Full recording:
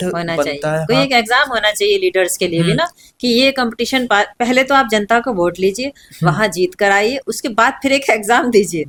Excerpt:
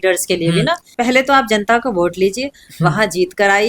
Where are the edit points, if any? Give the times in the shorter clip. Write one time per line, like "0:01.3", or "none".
0:00.9